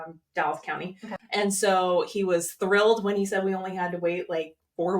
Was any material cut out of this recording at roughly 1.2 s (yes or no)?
yes